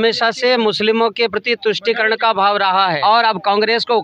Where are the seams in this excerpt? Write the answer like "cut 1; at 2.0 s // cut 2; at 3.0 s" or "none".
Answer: cut 1; at 3.0 s